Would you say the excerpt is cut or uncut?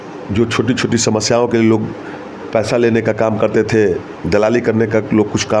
uncut